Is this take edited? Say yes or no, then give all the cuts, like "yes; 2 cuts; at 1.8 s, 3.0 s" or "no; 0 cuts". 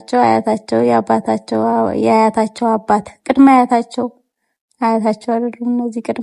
no; 0 cuts